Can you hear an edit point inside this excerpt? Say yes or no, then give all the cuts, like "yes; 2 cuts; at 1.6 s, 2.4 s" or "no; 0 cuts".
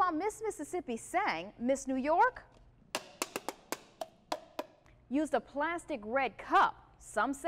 no; 0 cuts